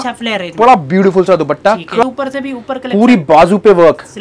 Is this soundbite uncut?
no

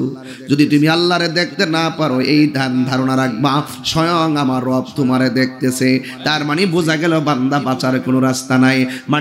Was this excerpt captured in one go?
yes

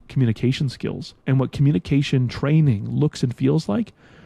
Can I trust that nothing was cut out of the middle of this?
no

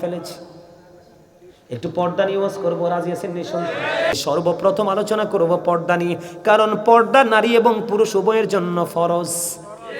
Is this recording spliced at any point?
yes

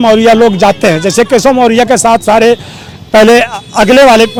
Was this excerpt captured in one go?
yes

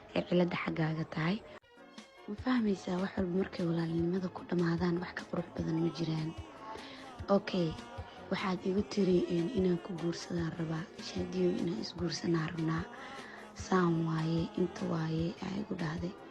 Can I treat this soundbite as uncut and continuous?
no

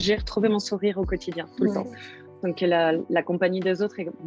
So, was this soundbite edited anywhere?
no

